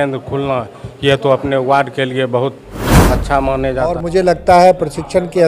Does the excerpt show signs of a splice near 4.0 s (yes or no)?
yes